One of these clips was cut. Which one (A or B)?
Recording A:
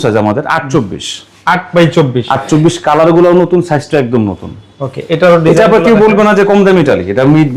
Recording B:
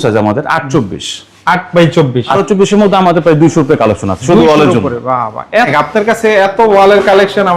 B